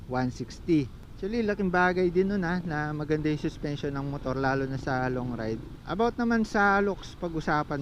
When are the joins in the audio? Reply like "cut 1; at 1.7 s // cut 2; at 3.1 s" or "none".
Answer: cut 1; at 1.0 s // cut 2; at 5.8 s